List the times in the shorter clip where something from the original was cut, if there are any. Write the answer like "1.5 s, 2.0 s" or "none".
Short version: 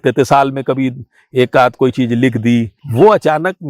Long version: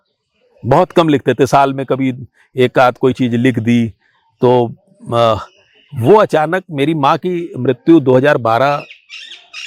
2.8 s